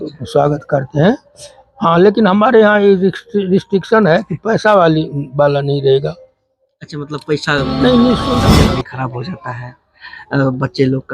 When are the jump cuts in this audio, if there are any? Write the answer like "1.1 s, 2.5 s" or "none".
8.4 s